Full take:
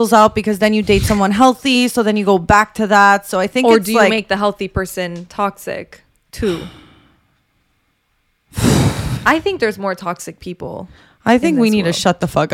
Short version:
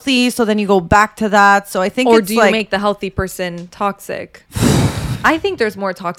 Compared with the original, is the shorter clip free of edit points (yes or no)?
no